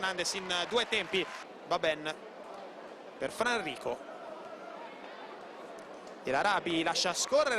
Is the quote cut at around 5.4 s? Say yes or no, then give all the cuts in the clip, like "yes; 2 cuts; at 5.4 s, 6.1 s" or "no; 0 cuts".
no; 1 cut; at 2.7 s